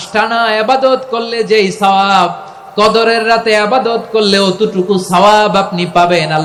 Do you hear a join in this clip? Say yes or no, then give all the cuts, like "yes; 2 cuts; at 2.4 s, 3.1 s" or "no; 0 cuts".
no; 0 cuts